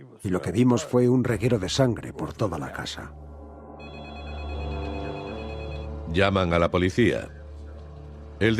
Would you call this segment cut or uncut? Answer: cut